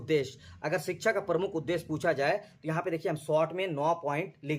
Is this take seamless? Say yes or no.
yes